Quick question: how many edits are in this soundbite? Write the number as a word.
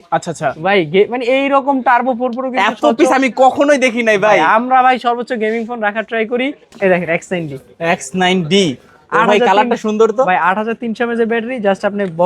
one